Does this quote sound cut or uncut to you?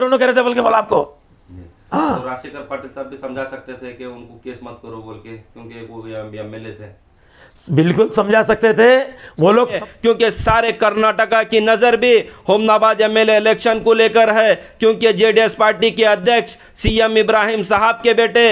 cut